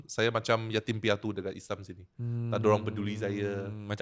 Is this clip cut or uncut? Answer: uncut